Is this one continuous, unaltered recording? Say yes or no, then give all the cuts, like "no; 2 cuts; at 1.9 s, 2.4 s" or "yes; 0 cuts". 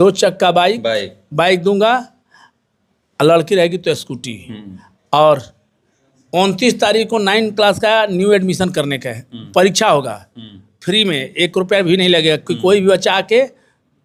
yes; 0 cuts